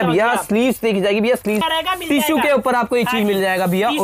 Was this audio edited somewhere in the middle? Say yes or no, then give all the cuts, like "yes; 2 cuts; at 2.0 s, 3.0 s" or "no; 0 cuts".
yes; 1 cut; at 1.6 s